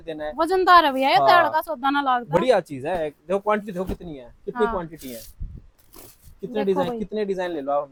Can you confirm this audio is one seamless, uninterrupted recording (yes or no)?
yes